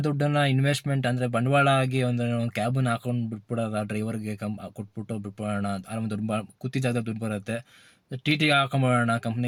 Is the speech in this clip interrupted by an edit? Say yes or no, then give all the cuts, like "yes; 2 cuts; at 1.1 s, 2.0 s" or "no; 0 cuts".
no; 0 cuts